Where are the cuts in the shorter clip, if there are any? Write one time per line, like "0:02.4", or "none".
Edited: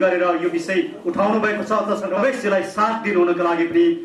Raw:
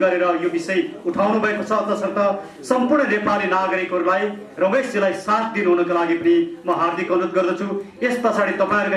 0:02.2